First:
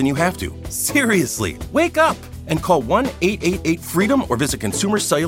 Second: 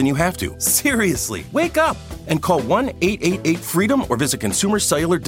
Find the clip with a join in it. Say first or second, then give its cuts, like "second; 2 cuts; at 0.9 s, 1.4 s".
second; 1 cut; at 1.0 s